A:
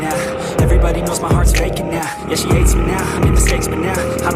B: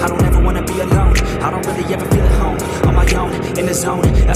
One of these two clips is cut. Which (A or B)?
A